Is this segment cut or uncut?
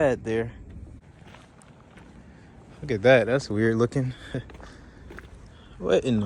cut